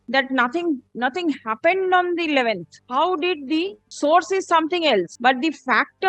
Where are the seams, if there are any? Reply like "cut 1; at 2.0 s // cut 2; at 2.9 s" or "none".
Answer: cut 1; at 2.7 s // cut 2; at 3.8 s // cut 3; at 5.1 s